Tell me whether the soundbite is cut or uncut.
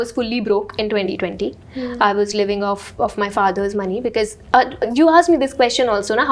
uncut